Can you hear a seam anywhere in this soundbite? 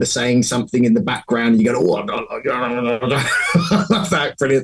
no; 0 cuts

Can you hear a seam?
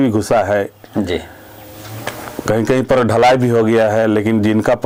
no; 0 cuts

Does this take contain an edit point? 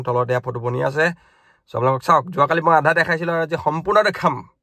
no; 0 cuts

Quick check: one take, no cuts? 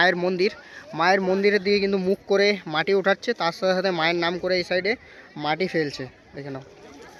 yes; 0 cuts

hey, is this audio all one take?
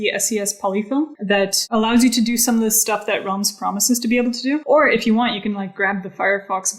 no; 2 cuts; at 1.2 s, 4.6 s

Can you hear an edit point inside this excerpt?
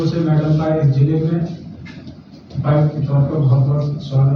no; 0 cuts

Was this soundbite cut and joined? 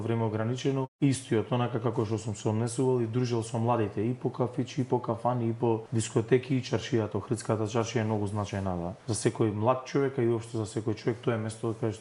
yes; 3 cuts; at 0.9 s, 5.9 s, 9.0 s

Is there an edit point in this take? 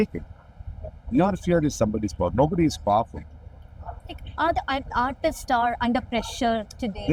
no; 0 cuts

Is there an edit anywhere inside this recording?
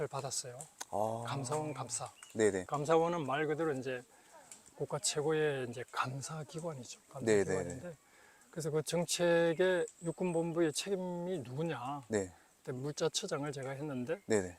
yes; 1 cut; at 2.7 s

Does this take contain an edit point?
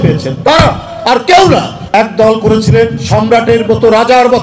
yes; 1 cut; at 1.8 s

